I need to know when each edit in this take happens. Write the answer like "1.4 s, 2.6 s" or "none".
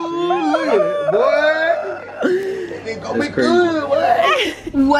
none